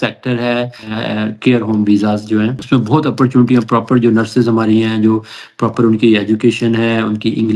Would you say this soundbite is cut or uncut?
cut